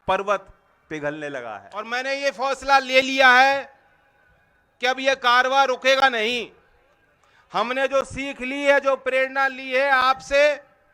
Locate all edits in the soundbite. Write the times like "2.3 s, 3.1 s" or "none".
1.9 s